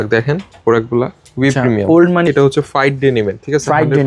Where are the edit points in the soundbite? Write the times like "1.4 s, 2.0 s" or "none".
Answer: 2.2 s